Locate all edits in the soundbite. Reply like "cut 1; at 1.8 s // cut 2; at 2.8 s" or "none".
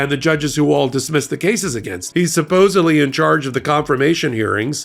cut 1; at 2.0 s